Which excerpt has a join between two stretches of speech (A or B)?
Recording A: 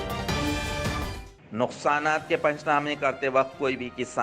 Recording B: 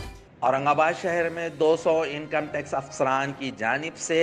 A